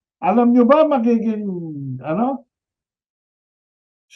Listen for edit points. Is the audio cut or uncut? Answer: uncut